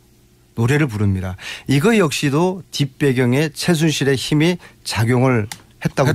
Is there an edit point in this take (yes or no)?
no